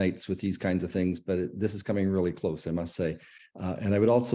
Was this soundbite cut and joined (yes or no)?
no